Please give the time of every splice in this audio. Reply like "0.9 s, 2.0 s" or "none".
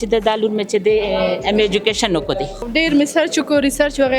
2.7 s